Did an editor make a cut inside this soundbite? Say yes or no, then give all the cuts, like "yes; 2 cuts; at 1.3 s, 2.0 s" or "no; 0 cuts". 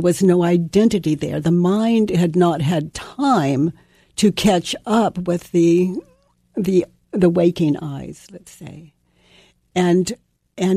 no; 0 cuts